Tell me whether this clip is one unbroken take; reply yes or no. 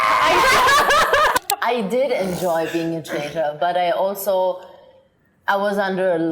no